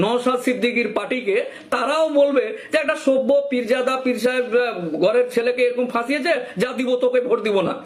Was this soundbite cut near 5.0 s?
no; 0 cuts

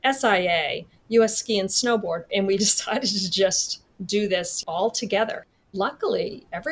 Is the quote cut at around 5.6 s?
yes; 3 cuts; at 2.3 s, 4.5 s, 5.6 s

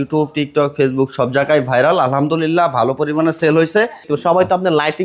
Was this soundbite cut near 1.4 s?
no; 1 cut; at 4.1 s

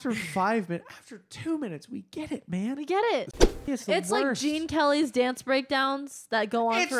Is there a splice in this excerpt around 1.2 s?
no; 1 cut; at 3.4 s

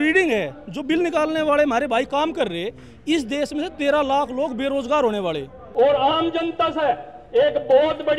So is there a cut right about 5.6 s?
yes; 1 cut; at 5.6 s

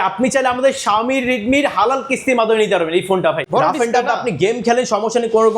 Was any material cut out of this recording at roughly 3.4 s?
yes; 1 cut; at 3.4 s

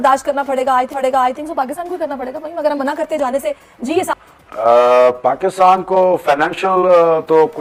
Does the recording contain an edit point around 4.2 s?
no; 0 cuts

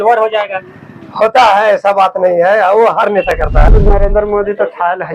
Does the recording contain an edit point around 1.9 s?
no; 1 cut; at 3.7 s

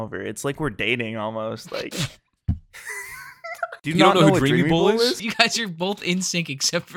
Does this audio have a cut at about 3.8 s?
yes; 2 cuts; at 3.8 s, 5.3 s

